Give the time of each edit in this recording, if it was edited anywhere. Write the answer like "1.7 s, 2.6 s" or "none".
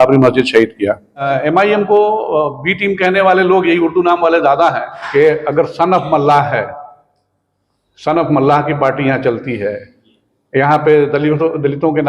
1.3 s, 4.9 s